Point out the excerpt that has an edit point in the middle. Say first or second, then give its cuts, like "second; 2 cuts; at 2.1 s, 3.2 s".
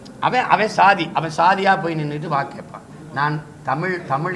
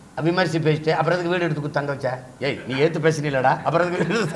second; 1 cut; at 2.3 s